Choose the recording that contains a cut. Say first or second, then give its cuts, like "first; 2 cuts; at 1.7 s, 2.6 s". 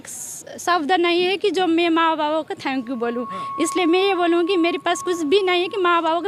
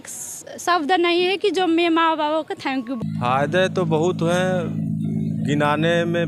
second; 1 cut; at 3.0 s